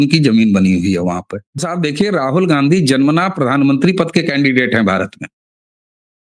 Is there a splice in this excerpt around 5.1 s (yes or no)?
no